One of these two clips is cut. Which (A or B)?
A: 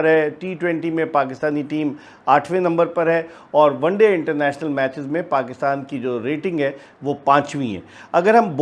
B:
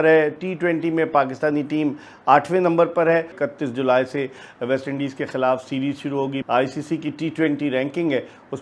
B